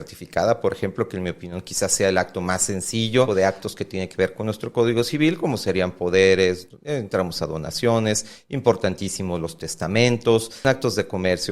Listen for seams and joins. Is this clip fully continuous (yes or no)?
no